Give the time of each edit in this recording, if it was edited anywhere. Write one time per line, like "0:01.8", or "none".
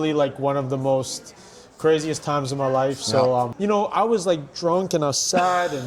0:03.5